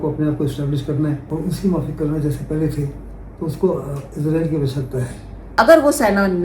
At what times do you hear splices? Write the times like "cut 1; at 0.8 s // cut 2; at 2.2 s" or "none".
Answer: cut 1; at 1.2 s // cut 2; at 5.4 s